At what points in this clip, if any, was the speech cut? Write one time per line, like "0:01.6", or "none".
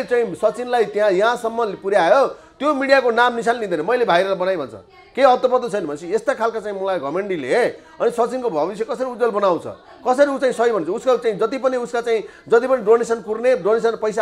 none